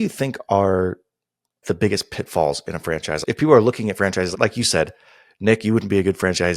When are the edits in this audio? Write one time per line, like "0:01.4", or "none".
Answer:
0:01.6
0:03.2